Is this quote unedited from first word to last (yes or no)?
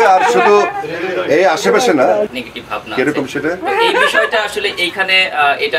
no